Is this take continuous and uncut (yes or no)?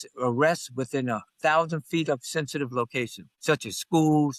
no